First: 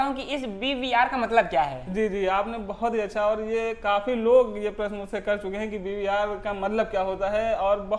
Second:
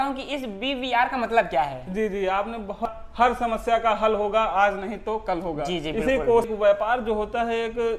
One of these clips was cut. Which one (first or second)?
second